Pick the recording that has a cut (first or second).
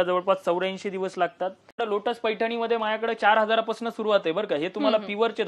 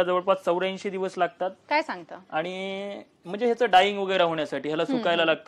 first